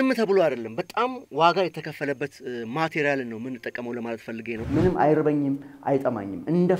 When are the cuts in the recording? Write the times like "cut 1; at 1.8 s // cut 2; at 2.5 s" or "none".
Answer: cut 1; at 4.6 s